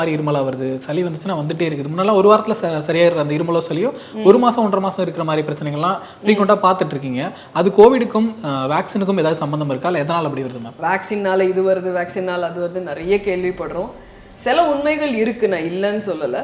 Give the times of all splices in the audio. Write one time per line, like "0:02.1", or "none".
0:10.7